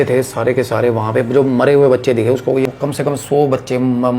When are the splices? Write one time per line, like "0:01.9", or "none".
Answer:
0:02.6